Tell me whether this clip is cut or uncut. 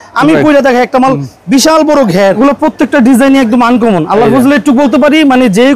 cut